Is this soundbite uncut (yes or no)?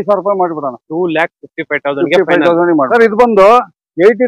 no